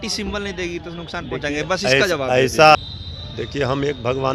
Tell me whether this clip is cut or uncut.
cut